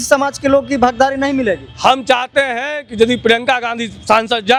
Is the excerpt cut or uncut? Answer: uncut